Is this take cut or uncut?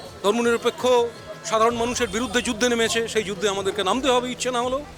uncut